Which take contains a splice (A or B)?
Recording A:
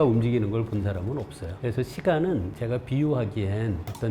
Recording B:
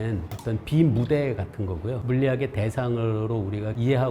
A